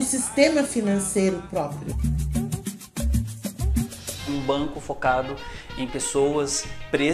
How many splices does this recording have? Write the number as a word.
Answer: two